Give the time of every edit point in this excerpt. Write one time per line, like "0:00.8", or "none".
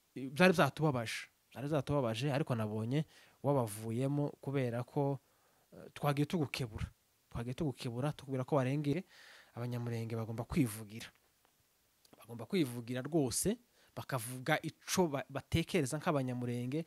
0:08.9